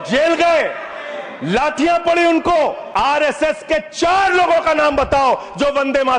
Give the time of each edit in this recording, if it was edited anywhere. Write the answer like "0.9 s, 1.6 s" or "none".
2.8 s